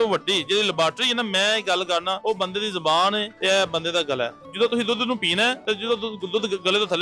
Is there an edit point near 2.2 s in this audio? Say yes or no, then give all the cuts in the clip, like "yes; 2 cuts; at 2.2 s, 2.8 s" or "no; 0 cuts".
yes; 4 cuts; at 2.2 s, 3.3 s, 4.4 s, 5.6 s